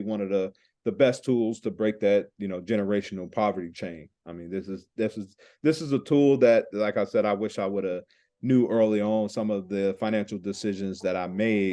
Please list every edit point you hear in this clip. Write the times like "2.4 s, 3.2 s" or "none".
none